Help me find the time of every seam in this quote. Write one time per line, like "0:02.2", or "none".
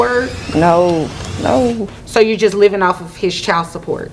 none